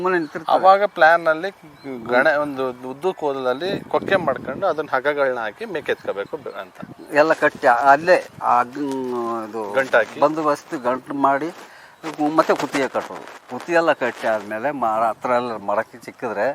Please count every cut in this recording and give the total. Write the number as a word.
zero